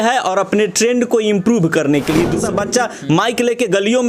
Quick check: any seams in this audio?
yes; 1 cut; at 2.4 s

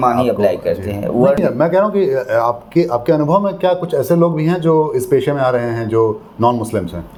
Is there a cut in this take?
no; 0 cuts

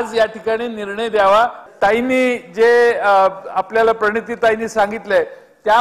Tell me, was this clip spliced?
yes; 1 cut; at 1.6 s

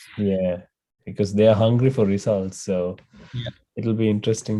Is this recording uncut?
yes; 0 cuts

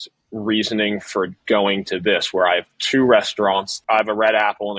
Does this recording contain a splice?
yes; 1 cut; at 3.7 s

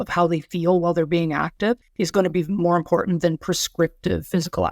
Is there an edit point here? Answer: yes; 1 cut; at 1.9 s

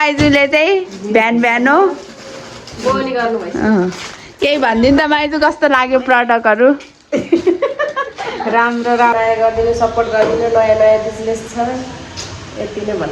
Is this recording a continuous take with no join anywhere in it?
no; 1 cut; at 9.1 s

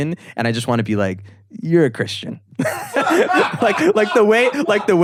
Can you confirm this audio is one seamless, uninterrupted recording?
yes; 0 cuts

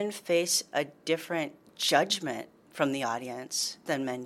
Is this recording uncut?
no; 1 cut; at 2.6 s

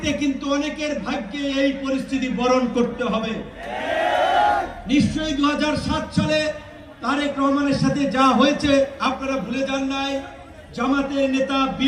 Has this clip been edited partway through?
no; 0 cuts

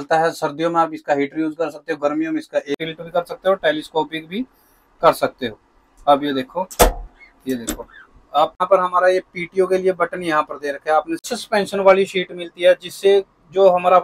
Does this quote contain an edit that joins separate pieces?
yes; 3 cuts; at 2.8 s, 8.6 s, 11.4 s

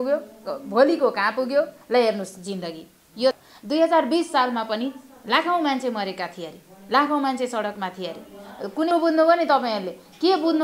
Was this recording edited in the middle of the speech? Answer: yes; 2 cuts; at 3.3 s, 8.9 s

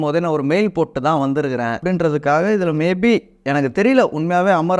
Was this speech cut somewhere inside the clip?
yes; 1 cut; at 1.8 s

